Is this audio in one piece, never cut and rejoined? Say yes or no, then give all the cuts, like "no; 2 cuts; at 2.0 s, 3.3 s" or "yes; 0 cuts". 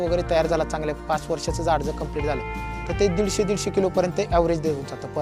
yes; 0 cuts